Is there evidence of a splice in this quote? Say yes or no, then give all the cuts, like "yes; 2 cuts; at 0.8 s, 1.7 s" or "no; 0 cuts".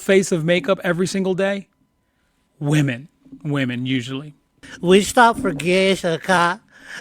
yes; 1 cut; at 4.6 s